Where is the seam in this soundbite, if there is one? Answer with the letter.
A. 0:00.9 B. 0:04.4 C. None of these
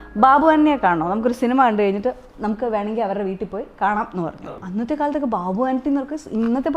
B